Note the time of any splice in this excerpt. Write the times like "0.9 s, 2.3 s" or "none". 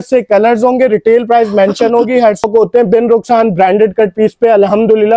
2.4 s